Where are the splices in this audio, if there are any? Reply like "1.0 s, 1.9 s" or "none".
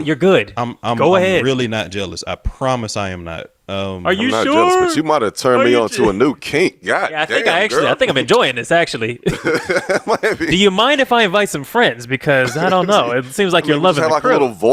none